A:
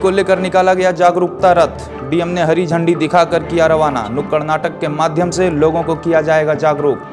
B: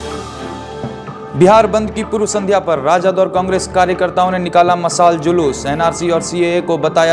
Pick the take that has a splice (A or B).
B